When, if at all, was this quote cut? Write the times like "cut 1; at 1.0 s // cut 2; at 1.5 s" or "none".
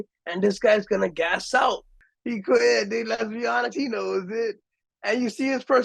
cut 1; at 2.0 s // cut 2; at 4.8 s